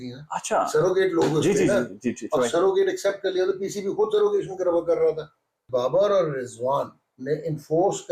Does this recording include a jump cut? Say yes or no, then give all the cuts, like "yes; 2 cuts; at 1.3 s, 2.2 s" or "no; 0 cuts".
yes; 1 cut; at 5.6 s